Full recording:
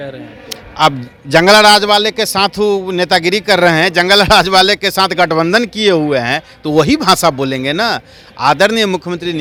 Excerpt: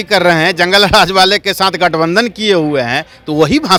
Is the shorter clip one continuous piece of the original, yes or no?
yes